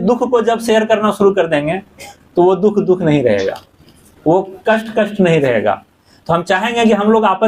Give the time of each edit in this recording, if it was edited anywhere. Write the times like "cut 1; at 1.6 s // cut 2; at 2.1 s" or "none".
none